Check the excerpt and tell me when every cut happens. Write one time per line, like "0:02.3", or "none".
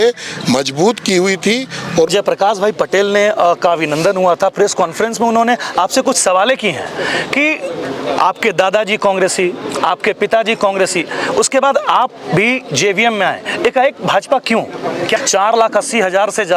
0:02.1
0:15.2